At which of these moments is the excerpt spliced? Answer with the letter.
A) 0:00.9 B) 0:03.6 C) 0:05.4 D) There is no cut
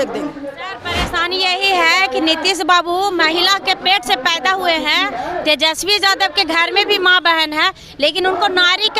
A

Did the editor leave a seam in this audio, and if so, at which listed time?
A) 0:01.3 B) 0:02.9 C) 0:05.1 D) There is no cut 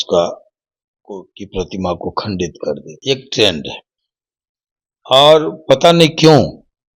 B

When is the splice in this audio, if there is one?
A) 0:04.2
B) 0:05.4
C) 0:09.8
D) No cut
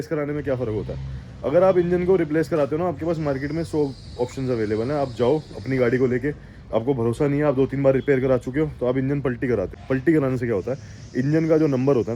C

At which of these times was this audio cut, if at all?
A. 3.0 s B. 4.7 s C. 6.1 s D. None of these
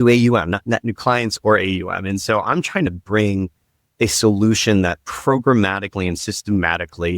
A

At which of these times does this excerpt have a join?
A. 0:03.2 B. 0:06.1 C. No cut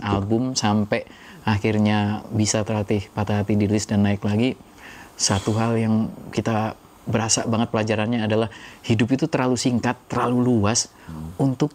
C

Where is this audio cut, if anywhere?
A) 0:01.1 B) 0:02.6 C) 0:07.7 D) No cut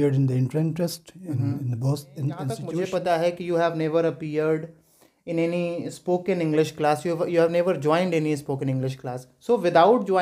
B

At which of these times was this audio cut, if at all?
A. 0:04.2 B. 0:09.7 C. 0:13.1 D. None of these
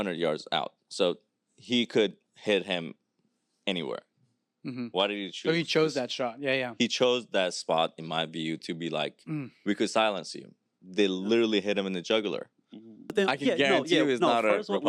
C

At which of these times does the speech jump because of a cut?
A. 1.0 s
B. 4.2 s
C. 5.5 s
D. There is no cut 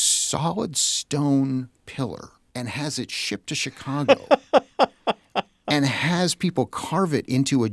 D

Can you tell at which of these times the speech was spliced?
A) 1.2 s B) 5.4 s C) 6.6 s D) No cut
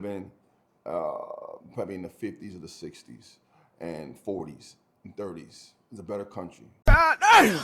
C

